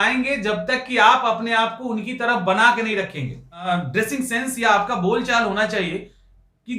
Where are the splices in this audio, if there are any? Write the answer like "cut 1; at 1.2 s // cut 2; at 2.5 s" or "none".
cut 1; at 3.7 s